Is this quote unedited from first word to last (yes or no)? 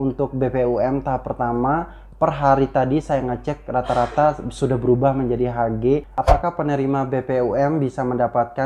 no